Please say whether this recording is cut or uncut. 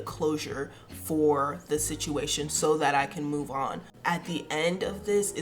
cut